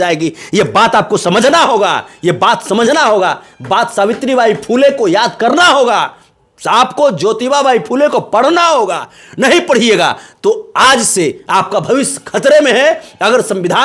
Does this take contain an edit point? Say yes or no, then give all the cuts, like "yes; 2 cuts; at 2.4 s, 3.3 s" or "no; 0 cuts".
no; 0 cuts